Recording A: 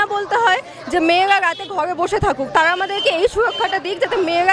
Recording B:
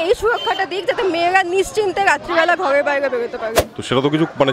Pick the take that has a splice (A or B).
B